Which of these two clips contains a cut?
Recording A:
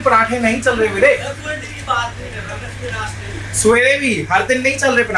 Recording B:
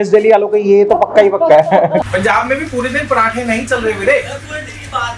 B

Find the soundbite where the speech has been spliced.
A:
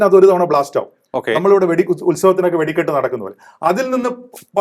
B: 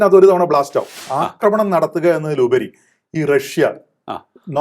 B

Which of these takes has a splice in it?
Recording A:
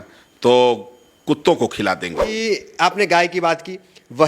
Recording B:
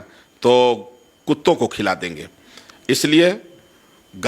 A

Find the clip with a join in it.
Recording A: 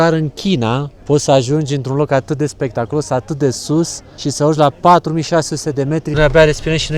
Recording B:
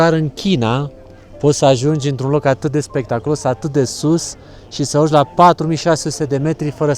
A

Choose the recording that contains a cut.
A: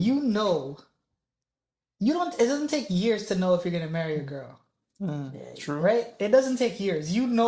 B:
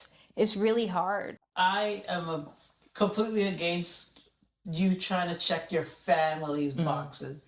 B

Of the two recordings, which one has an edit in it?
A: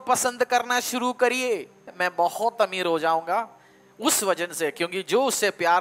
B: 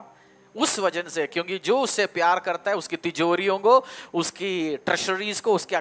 A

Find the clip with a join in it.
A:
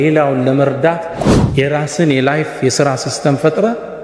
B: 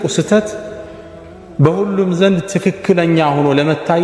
A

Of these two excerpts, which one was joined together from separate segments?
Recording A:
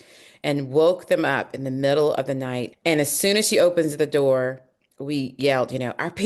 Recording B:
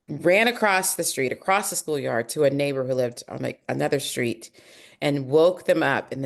A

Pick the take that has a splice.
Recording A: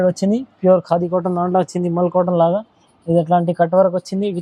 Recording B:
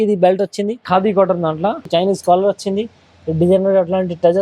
B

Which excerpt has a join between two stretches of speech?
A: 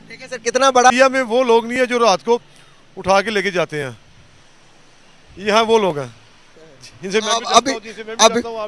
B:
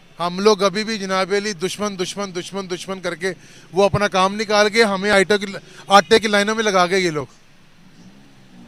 A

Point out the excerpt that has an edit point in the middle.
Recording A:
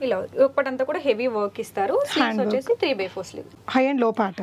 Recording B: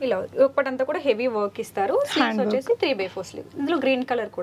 A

